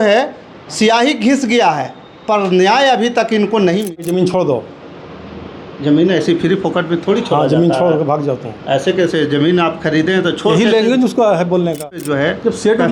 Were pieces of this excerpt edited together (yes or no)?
yes